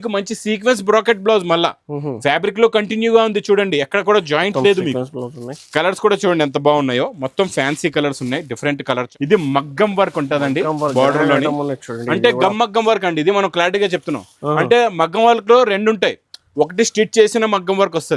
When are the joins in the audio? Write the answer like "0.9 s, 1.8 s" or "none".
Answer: 9.1 s